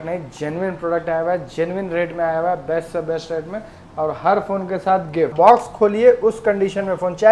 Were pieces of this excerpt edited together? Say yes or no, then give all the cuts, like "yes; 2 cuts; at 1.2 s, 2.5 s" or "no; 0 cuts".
yes; 1 cut; at 5.3 s